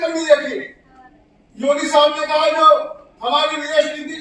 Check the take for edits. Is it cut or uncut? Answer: uncut